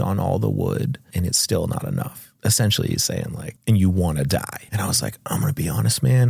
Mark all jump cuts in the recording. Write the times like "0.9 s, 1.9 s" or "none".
1.1 s, 2.2 s, 3.5 s, 4.6 s